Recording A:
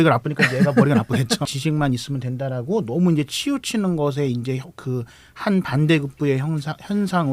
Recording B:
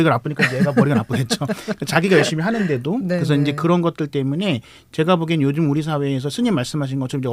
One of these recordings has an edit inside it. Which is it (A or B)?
A